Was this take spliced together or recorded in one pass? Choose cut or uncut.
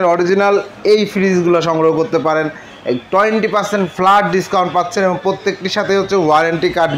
uncut